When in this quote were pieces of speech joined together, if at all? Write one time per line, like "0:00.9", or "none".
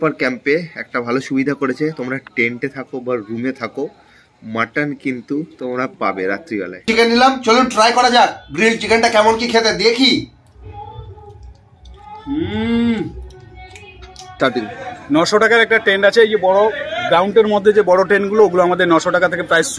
0:06.8
0:14.4